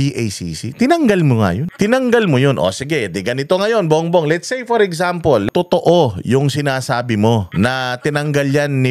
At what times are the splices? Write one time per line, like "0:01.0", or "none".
0:01.7
0:05.5
0:07.5